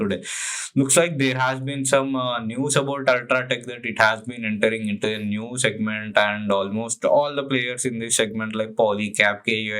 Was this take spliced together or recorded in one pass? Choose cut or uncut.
uncut